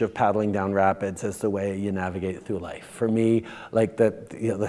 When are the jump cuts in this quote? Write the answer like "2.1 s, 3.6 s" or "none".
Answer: none